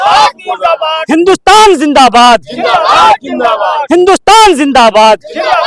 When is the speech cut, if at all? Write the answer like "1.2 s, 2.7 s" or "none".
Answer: none